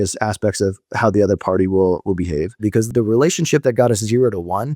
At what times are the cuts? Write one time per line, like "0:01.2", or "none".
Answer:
0:02.9